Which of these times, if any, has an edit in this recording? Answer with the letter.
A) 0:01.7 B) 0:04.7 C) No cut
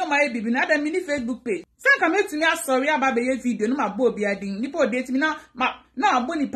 A